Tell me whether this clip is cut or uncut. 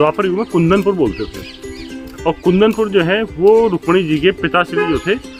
uncut